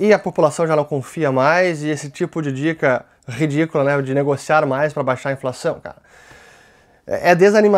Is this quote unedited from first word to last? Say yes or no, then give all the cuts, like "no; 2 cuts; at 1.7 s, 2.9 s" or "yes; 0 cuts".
yes; 0 cuts